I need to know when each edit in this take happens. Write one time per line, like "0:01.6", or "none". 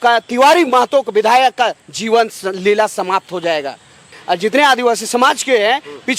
0:04.1